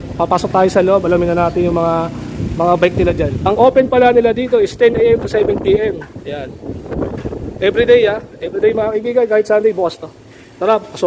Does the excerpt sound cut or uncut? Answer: cut